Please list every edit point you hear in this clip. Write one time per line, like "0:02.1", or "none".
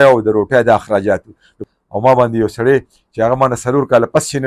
0:01.6